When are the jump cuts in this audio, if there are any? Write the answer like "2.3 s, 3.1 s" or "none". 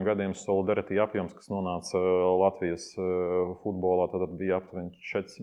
none